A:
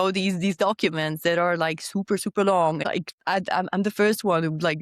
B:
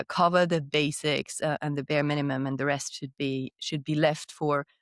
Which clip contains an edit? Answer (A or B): A